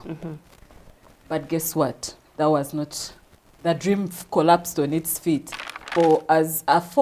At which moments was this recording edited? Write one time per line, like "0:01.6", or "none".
0:05.9